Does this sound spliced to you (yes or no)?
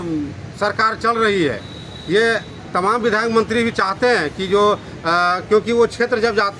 no